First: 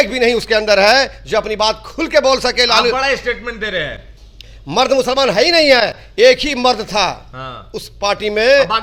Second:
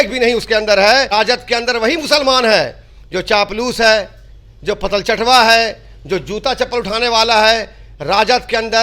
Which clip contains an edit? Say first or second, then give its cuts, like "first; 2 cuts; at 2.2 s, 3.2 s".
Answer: second; 1 cut; at 1.1 s